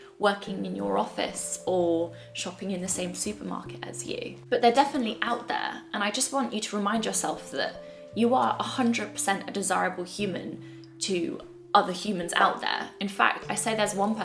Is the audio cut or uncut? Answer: uncut